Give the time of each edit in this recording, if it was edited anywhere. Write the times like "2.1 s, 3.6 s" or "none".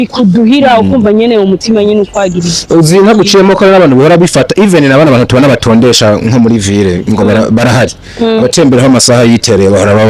none